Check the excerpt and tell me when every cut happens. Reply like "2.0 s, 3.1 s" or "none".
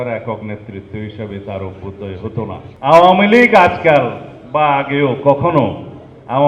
2.6 s